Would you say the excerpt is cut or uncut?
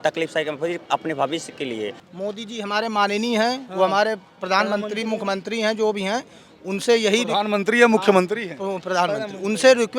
cut